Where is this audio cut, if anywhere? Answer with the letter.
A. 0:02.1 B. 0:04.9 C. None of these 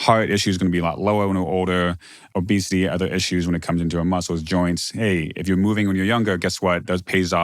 A